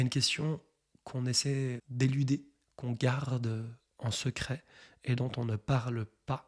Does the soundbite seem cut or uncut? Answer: cut